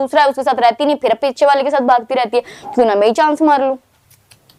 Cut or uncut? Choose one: uncut